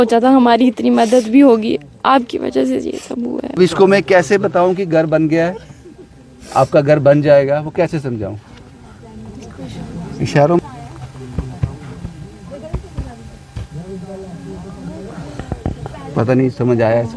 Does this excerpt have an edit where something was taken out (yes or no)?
yes